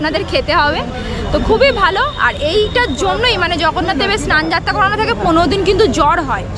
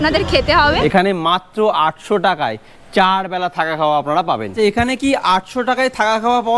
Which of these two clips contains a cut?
second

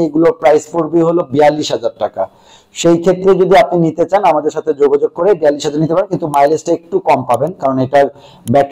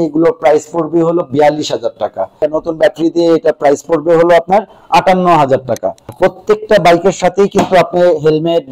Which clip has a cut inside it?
second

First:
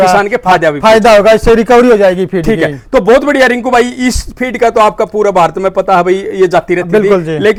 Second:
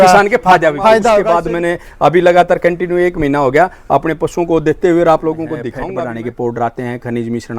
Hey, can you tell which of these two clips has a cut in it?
second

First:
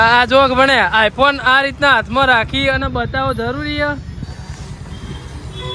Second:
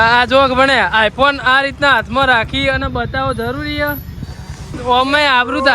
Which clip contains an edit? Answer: second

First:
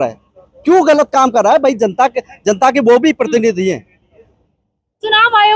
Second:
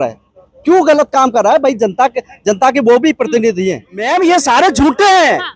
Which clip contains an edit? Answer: second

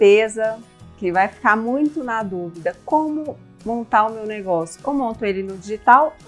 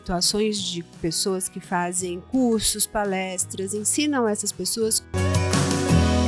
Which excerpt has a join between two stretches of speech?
second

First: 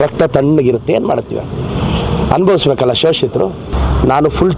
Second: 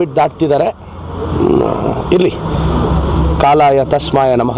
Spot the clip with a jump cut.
first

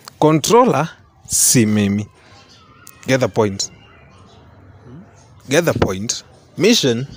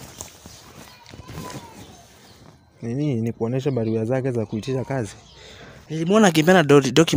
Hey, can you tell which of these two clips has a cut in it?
second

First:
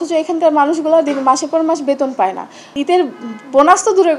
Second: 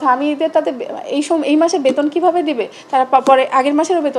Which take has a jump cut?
first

